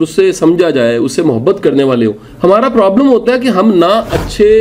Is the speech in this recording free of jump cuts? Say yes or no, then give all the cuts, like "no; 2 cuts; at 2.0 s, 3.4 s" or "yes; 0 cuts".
no; 1 cut; at 2.2 s